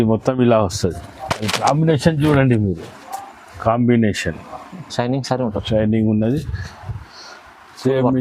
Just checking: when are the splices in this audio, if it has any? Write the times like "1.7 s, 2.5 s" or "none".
4.9 s